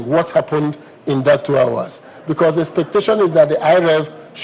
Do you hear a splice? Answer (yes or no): no